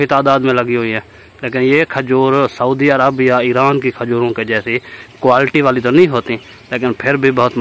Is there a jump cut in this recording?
no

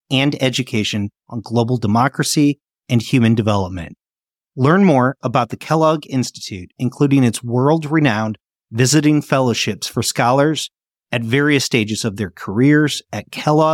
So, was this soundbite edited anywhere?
no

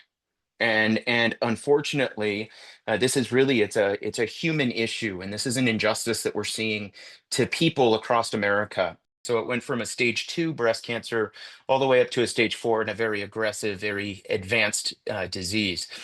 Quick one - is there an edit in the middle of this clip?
yes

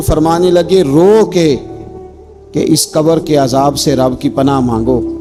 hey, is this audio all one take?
yes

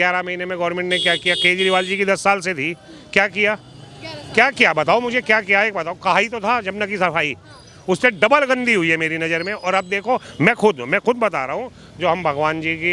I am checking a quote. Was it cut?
no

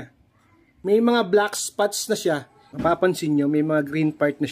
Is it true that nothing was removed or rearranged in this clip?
no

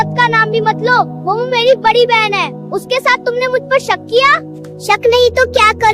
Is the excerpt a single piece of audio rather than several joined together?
yes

